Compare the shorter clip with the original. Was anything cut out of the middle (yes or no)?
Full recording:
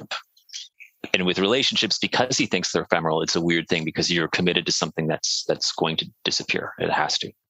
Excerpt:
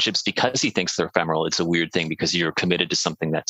no